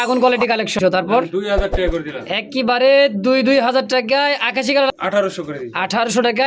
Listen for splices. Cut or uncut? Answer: cut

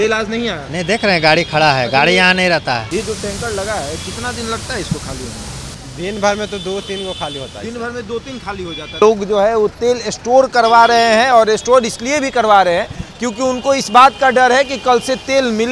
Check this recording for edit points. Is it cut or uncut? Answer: cut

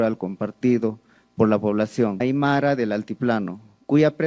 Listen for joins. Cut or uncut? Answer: cut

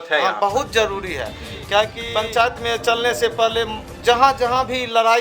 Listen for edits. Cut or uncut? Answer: cut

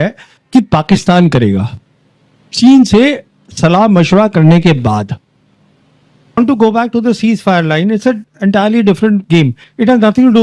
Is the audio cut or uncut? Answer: cut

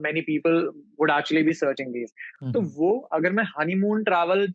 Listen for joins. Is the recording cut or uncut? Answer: uncut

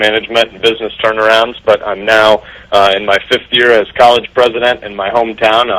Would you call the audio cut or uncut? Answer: uncut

